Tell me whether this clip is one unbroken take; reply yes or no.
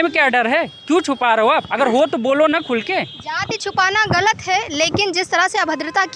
yes